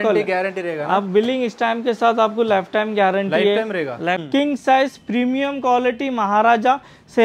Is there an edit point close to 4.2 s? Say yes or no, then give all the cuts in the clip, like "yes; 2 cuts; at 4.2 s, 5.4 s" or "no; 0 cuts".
yes; 1 cut; at 4.2 s